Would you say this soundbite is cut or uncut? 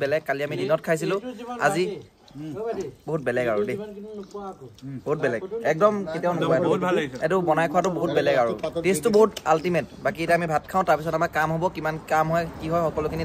uncut